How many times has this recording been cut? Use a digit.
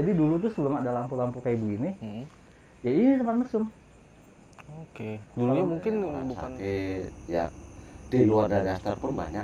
1